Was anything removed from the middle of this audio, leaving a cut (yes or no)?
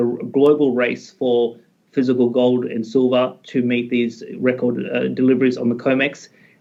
no